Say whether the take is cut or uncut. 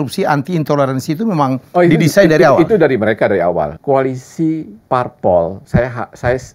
cut